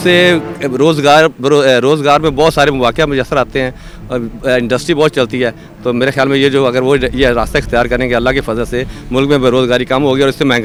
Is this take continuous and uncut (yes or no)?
yes